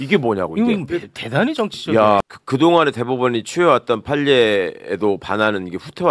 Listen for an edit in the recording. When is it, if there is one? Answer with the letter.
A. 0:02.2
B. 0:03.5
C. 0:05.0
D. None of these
A